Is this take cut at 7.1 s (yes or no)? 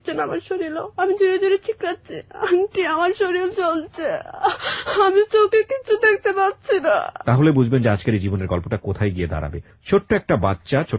yes